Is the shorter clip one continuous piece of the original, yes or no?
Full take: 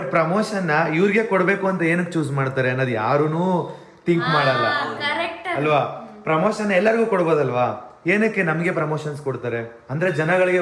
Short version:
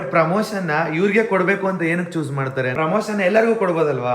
no